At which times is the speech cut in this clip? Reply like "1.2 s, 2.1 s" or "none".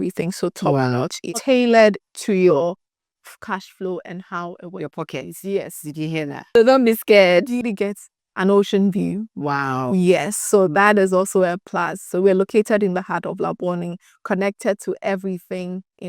1.2 s, 7.6 s